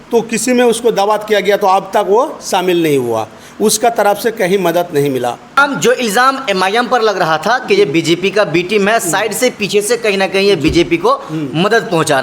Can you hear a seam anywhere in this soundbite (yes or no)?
yes